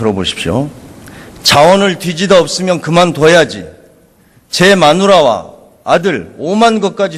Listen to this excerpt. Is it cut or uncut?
uncut